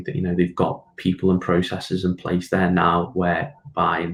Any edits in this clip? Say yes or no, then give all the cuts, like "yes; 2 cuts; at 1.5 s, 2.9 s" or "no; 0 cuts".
no; 0 cuts